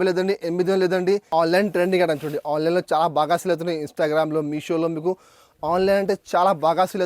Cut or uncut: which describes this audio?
cut